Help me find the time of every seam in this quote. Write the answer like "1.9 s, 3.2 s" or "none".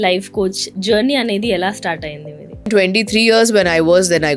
2.7 s